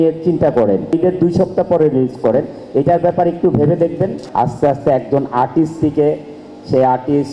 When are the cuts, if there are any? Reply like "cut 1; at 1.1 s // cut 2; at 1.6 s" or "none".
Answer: cut 1; at 0.9 s // cut 2; at 4.2 s